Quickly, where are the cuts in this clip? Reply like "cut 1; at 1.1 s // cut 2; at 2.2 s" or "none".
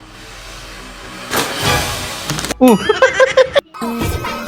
cut 1; at 3.6 s